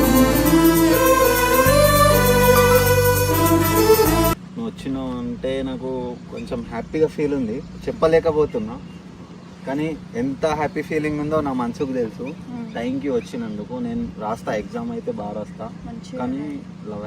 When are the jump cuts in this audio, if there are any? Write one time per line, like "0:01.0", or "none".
0:04.5